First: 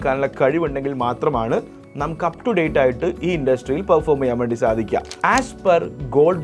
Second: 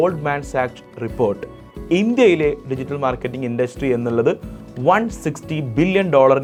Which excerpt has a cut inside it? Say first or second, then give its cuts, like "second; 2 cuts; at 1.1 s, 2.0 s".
first; 1 cut; at 5.1 s